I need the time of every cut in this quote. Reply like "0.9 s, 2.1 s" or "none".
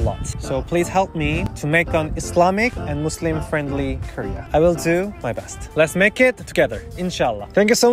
none